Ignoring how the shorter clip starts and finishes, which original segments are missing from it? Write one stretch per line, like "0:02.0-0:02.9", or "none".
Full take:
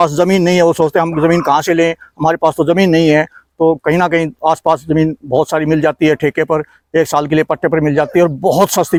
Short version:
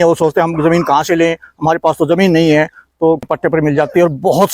0:03.8-0:07.5